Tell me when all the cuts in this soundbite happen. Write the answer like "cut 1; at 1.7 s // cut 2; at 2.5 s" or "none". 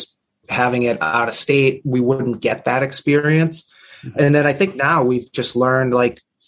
none